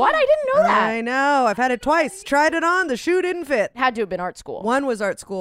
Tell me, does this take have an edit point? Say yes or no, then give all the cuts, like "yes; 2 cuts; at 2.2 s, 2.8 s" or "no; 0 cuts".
yes; 2 cuts; at 2.2 s, 3.8 s